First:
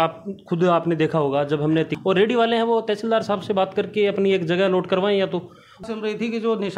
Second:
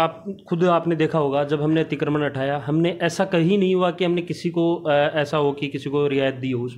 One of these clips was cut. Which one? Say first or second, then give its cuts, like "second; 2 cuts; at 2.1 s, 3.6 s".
first; 2 cuts; at 1.9 s, 5.7 s